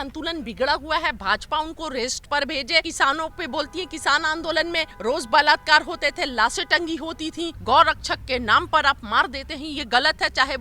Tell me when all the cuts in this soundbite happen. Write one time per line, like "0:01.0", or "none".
0:02.9
0:04.9
0:07.6